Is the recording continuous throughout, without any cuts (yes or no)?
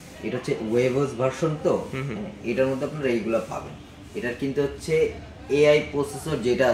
yes